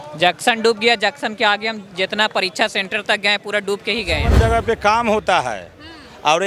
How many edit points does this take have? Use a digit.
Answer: 1